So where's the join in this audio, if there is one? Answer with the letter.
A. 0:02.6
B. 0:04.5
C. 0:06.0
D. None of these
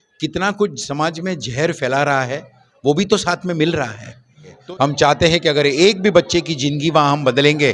B